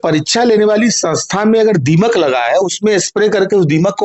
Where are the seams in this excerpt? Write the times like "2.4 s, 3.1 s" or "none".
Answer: none